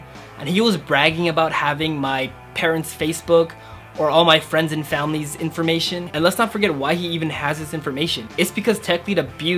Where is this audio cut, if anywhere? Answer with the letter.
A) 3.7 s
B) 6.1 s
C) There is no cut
B